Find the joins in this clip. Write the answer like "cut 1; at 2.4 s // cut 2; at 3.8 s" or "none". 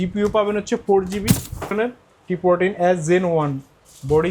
cut 1; at 1.7 s